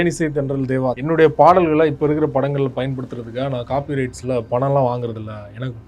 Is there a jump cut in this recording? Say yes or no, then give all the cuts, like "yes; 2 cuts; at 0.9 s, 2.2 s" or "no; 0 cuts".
yes; 1 cut; at 1.0 s